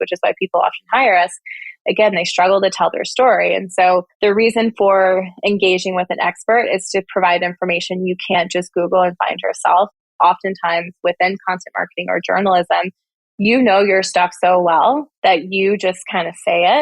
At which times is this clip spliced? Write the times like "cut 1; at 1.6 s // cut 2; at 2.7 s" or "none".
cut 1; at 10.2 s